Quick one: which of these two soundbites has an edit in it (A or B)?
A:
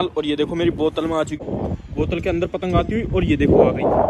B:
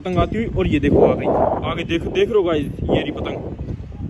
A